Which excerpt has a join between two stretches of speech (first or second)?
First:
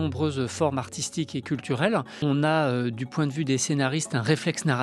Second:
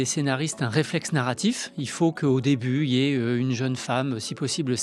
first